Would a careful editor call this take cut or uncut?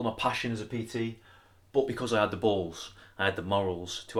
uncut